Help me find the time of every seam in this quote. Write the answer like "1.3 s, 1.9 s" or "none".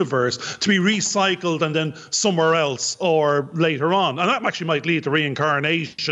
none